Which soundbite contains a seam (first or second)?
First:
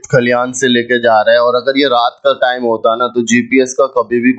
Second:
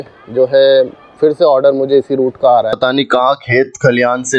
second